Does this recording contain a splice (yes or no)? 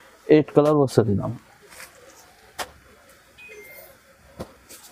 no